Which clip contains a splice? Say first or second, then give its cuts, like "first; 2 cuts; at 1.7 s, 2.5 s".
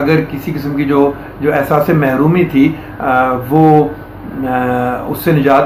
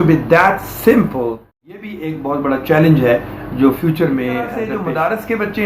second; 2 cuts; at 1.9 s, 4.7 s